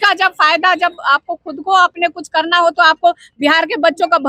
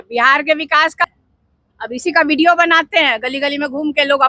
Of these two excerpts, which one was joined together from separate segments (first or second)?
second